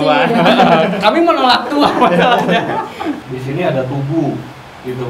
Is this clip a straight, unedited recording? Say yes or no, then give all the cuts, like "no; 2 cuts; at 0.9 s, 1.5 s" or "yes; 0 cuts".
no; 1 cut; at 3.1 s